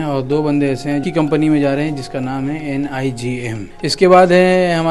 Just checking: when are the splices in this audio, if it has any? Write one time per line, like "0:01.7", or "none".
0:01.0
0:03.7